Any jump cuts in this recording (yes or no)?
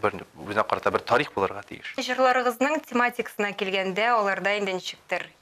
yes